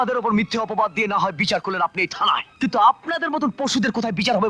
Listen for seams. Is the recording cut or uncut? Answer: cut